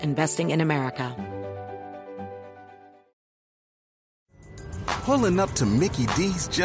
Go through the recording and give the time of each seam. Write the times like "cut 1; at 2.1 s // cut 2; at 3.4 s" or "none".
cut 1; at 1.1 s